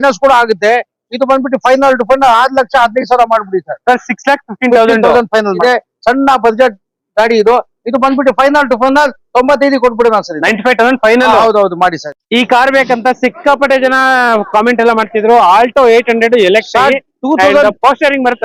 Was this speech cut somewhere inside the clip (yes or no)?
yes